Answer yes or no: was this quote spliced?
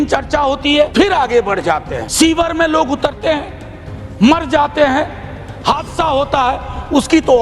yes